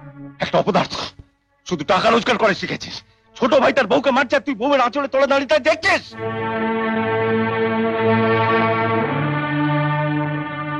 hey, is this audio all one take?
yes; 0 cuts

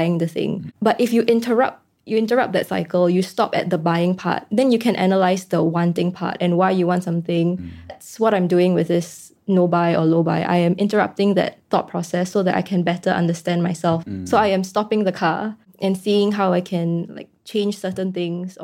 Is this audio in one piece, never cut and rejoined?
no; 2 cuts; at 8.0 s, 14.0 s

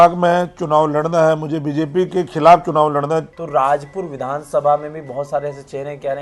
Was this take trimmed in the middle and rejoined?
yes; 1 cut; at 3.4 s

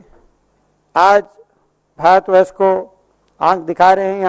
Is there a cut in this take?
no; 0 cuts

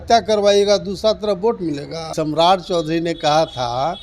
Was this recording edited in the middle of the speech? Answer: yes; 1 cut; at 2.1 s

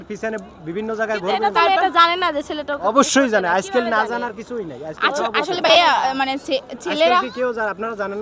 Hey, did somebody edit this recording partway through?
no; 0 cuts

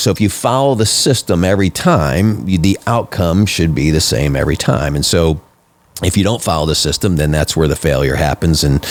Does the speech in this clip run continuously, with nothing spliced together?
yes; 0 cuts

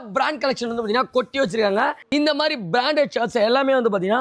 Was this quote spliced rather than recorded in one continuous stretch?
yes; 1 cut; at 2.0 s

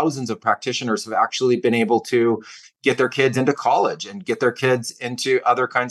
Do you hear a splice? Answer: no; 0 cuts

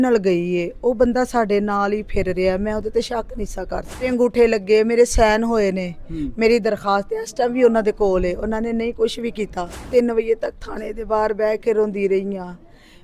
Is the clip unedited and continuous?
no; 2 cuts; at 4.1 s, 9.9 s

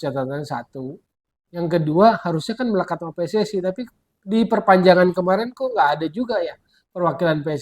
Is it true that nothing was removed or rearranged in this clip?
yes; 0 cuts

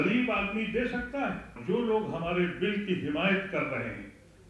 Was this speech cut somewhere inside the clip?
yes; 1 cut; at 1.6 s

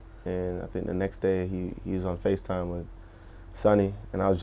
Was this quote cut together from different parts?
no; 0 cuts

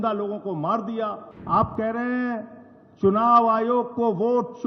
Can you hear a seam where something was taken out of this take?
yes; 1 cut; at 1.3 s

